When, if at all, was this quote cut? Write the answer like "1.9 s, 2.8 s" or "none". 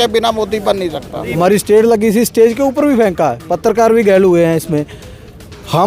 1.3 s